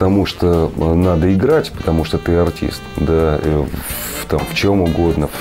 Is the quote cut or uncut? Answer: uncut